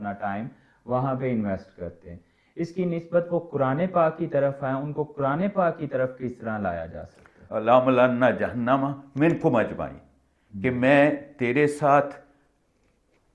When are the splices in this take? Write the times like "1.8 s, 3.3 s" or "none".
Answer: 7.5 s